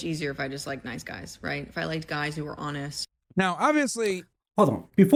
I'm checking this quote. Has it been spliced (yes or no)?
no